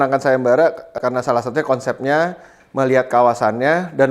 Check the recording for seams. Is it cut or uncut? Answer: cut